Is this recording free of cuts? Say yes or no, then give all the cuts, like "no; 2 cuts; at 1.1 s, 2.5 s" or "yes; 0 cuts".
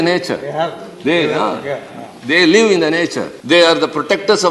no; 1 cut; at 3.3 s